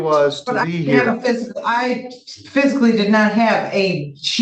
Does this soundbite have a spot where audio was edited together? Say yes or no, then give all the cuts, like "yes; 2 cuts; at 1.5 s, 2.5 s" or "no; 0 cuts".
no; 0 cuts